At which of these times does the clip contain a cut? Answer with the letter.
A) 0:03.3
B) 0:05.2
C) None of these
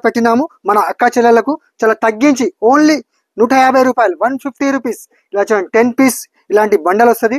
C